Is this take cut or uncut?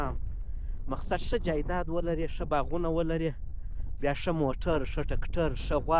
uncut